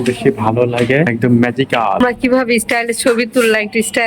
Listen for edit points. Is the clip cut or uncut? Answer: cut